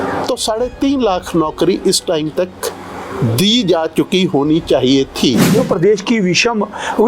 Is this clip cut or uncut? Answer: cut